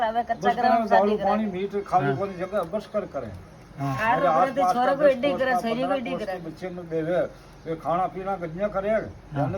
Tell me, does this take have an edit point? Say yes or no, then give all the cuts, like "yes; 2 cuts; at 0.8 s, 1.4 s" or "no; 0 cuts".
no; 0 cuts